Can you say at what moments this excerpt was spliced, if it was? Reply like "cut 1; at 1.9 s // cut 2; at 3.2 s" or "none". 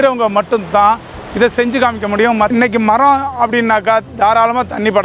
cut 1; at 2.5 s